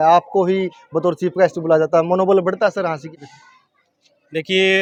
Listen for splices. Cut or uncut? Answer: uncut